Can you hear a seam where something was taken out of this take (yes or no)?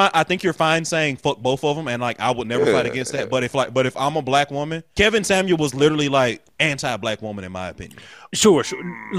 yes